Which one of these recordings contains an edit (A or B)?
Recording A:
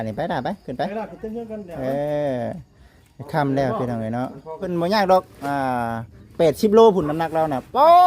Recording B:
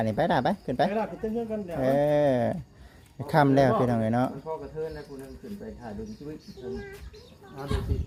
A